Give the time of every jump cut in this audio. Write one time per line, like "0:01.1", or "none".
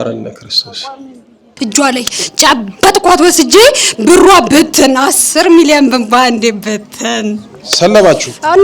0:01.5